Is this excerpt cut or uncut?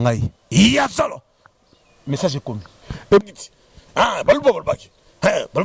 cut